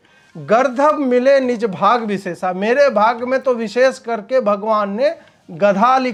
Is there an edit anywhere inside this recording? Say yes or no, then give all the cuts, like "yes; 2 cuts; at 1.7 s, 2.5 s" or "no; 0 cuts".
no; 0 cuts